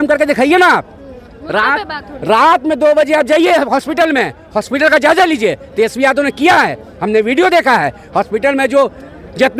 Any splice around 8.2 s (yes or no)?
no